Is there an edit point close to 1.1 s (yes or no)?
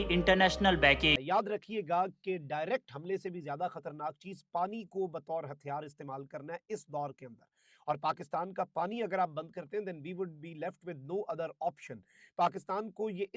yes